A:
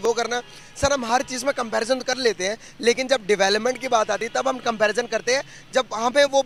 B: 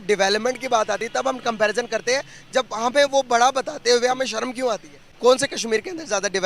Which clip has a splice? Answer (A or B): B